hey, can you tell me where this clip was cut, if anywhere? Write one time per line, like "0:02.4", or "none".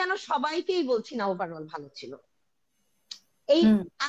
none

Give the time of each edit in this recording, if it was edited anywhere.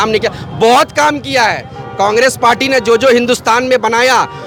none

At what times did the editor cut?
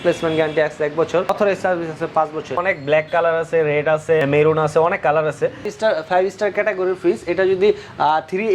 0:01.3
0:02.6
0:04.2
0:05.7

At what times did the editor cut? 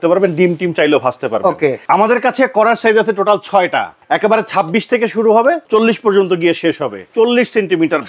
0:01.8
0:03.9
0:05.6
0:07.1

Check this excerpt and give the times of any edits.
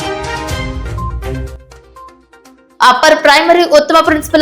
0:01.3

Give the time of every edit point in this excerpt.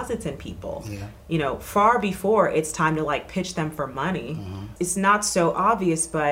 0:04.7

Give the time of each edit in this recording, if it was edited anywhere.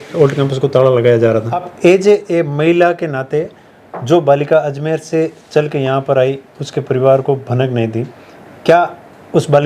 0:01.7

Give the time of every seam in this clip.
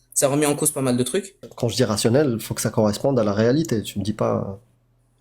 0:01.5

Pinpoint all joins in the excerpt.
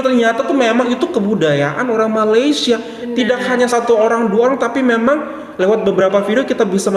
none

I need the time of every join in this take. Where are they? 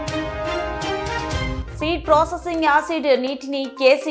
0:01.6

